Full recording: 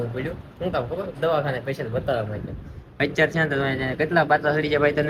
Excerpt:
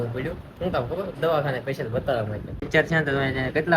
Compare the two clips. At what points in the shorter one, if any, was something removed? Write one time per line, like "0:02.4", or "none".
0:02.7